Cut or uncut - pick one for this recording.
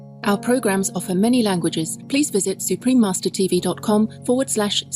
cut